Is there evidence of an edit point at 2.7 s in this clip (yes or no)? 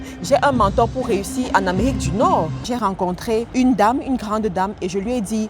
yes